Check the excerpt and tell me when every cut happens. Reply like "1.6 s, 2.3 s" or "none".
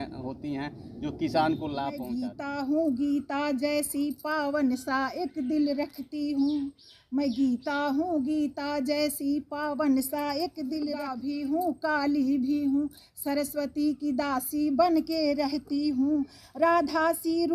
2.2 s, 11.1 s